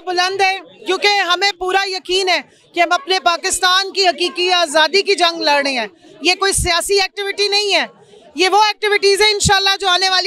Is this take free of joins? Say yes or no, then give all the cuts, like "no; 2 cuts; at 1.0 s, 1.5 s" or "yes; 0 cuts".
yes; 0 cuts